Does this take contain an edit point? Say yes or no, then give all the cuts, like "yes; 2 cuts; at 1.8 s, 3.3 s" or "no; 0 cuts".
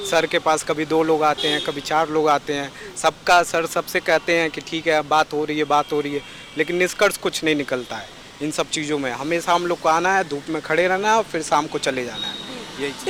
no; 0 cuts